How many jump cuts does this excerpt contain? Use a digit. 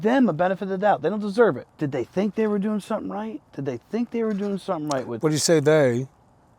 2